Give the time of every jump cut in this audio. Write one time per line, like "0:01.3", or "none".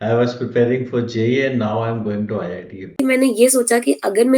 0:03.0